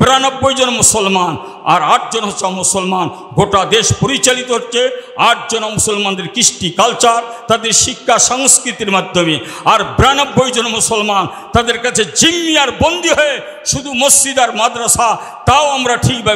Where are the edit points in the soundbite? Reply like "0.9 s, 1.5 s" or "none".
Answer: none